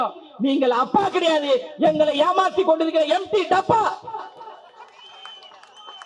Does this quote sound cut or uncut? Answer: uncut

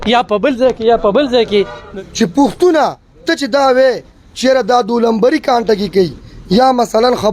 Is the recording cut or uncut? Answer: cut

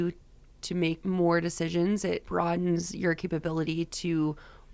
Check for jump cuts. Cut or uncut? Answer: cut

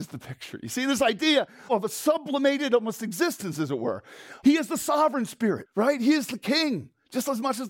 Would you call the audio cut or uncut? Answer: cut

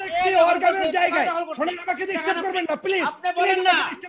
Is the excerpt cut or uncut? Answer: uncut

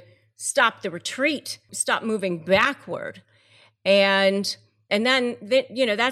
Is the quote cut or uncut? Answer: uncut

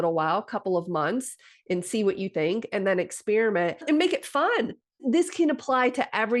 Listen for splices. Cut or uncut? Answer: cut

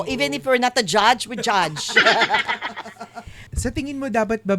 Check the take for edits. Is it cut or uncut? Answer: cut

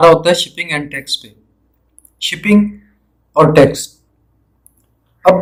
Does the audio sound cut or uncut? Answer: uncut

